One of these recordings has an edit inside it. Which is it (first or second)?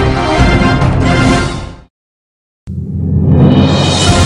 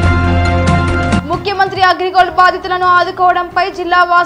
second